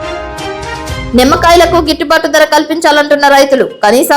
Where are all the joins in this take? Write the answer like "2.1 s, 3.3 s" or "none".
1.0 s